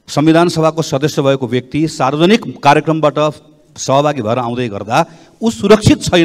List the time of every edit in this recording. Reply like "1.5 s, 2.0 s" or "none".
none

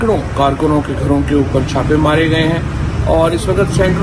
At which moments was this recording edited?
none

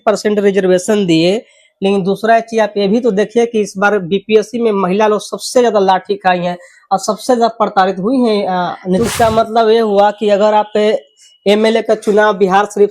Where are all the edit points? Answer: 9.1 s

